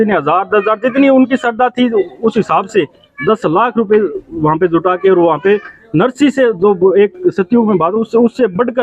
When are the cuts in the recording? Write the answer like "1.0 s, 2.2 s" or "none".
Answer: none